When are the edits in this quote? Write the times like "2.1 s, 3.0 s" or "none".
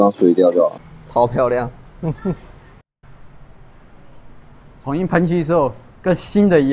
1.0 s, 3.0 s